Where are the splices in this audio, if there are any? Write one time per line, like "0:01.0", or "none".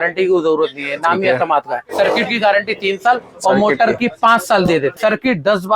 0:01.9
0:04.9